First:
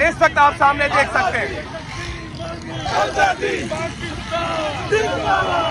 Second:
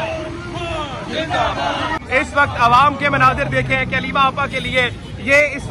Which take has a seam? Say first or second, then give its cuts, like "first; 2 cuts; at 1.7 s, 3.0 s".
second; 1 cut; at 2.0 s